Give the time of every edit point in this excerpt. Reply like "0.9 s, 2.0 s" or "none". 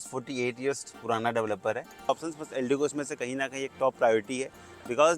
2.1 s